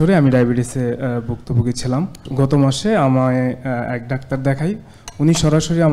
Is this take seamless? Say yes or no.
no